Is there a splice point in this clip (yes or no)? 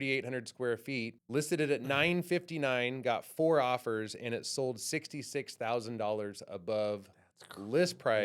yes